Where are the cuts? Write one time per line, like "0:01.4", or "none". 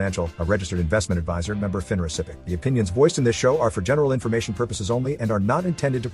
0:02.4

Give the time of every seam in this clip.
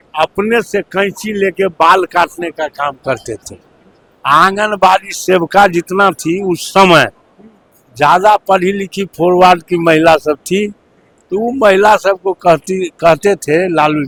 none

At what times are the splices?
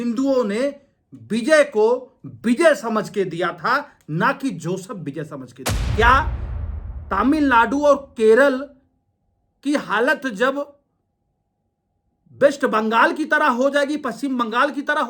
0:05.9

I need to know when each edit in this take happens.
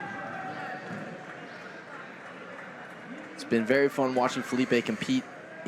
0:04.1

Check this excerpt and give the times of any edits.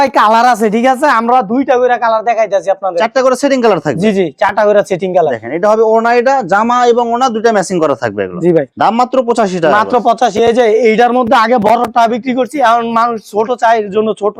none

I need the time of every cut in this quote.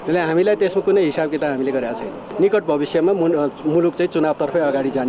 0:02.2

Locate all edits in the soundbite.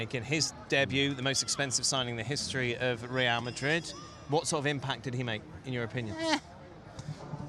none

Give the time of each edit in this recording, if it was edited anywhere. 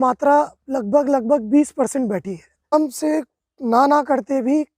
0:02.7

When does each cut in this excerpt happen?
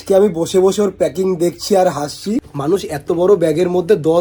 0:02.5

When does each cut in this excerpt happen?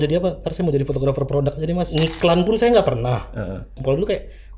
0:01.9
0:03.8

